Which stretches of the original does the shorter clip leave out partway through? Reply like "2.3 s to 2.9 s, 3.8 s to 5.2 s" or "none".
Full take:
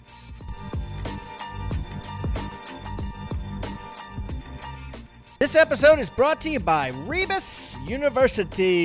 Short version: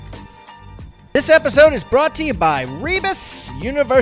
1.9 s to 5.2 s